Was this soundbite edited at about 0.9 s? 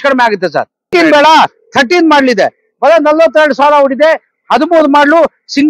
yes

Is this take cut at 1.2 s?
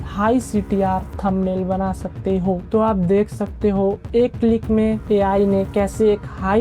no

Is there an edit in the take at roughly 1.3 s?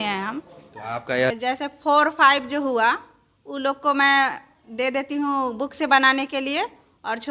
yes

